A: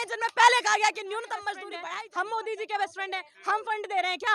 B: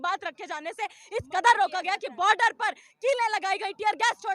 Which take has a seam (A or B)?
A